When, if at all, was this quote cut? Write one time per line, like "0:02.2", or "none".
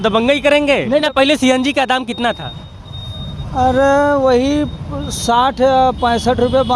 0:01.0

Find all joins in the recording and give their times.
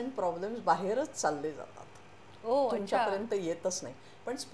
none

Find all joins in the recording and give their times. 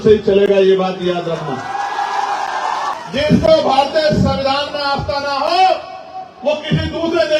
0:02.9

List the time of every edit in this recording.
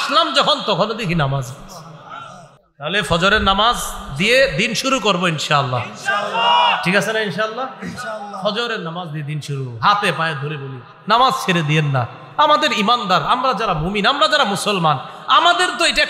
0:02.6

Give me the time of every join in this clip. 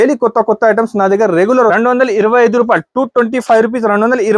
0:01.7

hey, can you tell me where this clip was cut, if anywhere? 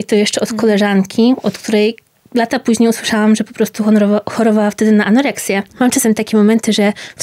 0:05.7

